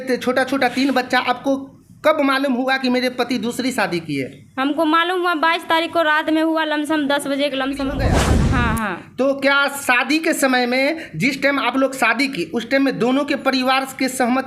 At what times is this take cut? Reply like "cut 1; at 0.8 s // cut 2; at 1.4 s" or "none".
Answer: cut 1; at 8.1 s